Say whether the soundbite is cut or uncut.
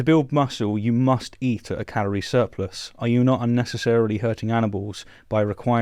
uncut